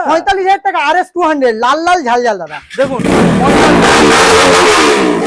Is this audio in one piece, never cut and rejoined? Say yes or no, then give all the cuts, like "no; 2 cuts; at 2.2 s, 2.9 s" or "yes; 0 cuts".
yes; 0 cuts